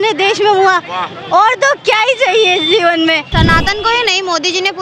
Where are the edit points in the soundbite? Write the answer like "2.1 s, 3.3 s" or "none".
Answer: 3.3 s